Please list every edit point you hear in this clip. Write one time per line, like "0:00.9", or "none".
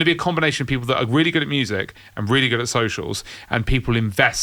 none